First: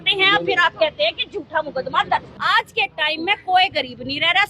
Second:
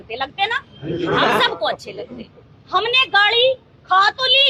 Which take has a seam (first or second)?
first